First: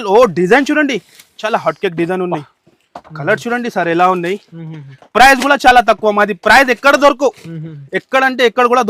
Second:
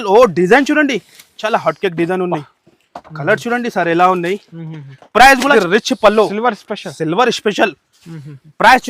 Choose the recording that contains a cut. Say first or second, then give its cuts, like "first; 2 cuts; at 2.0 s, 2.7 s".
second; 1 cut; at 5.5 s